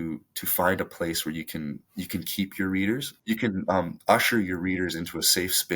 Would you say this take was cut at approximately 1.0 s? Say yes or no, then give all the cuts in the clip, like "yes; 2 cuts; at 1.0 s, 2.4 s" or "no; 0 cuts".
no; 1 cut; at 3.1 s